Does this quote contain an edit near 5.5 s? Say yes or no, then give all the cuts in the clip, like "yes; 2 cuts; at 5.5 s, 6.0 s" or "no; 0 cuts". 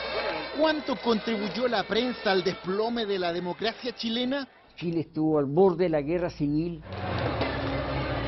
yes; 1 cut; at 5.5 s